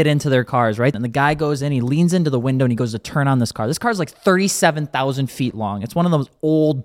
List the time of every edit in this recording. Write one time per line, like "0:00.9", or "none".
0:00.9